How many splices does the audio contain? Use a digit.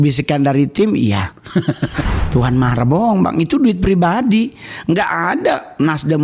1